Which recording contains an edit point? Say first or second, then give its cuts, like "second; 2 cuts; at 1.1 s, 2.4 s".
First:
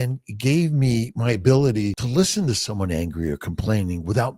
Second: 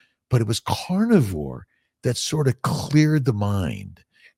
first; 1 cut; at 2.0 s